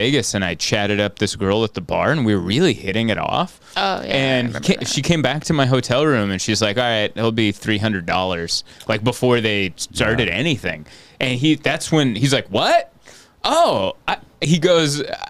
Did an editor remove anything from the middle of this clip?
no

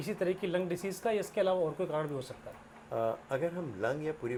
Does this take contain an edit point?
no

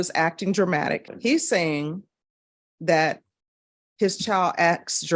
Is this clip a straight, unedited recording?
no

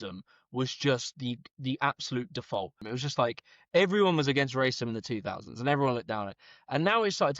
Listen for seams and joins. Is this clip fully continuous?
no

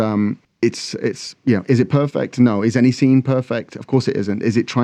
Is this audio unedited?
yes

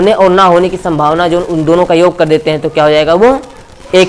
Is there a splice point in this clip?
no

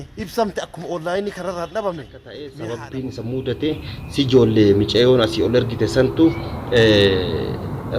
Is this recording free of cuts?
no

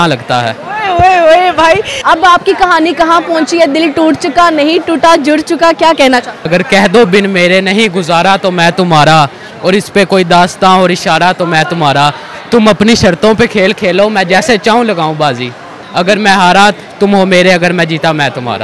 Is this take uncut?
no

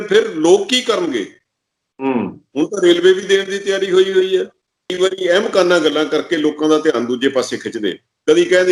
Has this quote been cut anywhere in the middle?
yes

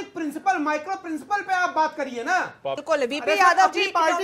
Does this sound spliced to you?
yes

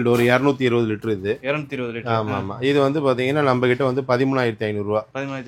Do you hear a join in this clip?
no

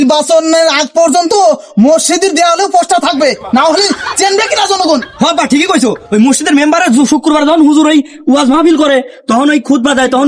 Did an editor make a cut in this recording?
no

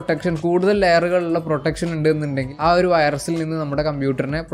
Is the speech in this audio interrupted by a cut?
no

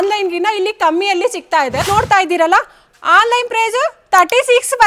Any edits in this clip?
yes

